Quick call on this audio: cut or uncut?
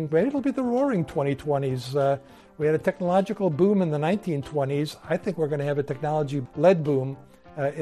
cut